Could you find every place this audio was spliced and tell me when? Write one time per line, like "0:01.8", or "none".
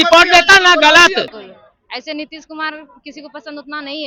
0:01.4